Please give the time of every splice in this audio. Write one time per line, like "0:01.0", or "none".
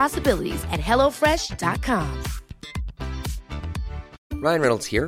0:04.1